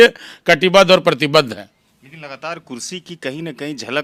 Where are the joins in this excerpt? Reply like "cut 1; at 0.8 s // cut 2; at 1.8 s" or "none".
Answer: none